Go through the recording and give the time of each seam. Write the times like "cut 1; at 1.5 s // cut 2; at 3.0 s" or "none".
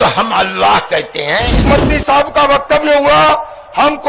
cut 1; at 1.7 s